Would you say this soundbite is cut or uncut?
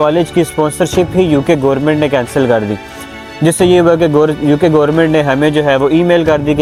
uncut